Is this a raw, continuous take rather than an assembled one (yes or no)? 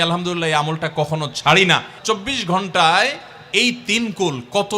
no